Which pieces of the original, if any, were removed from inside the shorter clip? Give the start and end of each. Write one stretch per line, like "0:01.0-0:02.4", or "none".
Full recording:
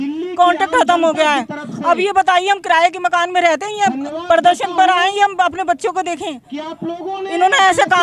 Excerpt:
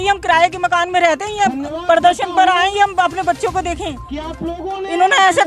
none